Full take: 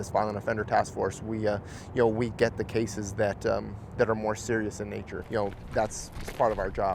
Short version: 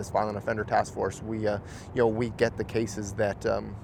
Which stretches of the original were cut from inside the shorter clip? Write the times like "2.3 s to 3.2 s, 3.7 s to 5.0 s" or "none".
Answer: none